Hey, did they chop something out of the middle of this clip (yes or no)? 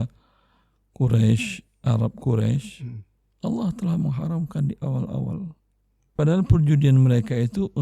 yes